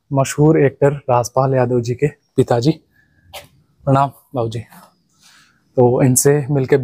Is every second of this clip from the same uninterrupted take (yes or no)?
yes